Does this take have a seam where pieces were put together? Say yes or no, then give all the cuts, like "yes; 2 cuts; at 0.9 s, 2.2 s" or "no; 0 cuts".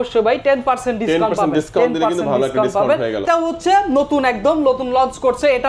yes; 1 cut; at 3.2 s